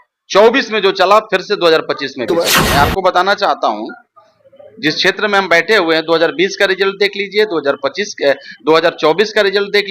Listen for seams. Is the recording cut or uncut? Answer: cut